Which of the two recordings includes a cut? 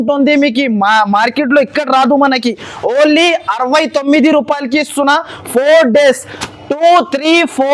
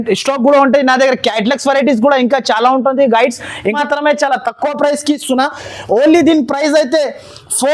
second; 1 cut; at 3.8 s

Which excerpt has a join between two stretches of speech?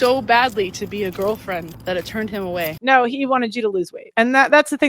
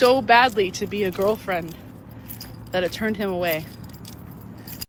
first; 2 cuts; at 1.7 s, 2.8 s

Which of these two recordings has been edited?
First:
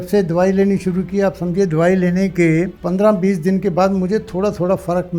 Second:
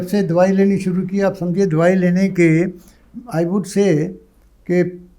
first; 1 cut; at 2.8 s

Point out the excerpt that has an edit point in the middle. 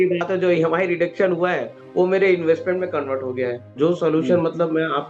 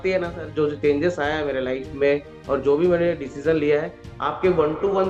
first; 1 cut; at 3.6 s

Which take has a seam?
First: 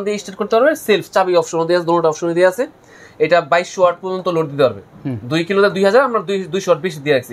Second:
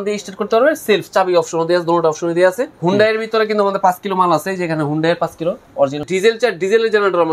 second; 2 cuts; at 2.7 s, 6.1 s

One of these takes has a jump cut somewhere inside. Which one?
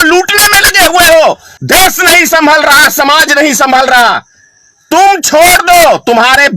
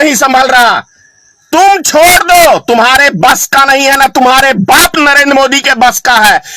first; 1 cut; at 1.5 s

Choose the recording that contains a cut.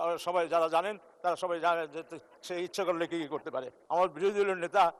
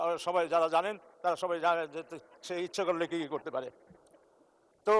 first; 1 cut; at 3.8 s

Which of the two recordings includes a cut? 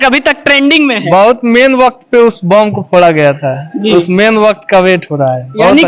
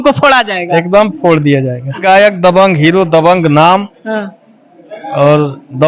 second; 1 cut; at 2.0 s

